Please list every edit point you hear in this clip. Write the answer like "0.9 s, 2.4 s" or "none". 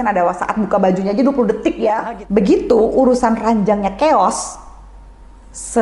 2.0 s